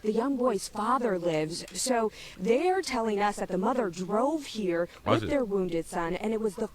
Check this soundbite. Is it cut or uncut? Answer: cut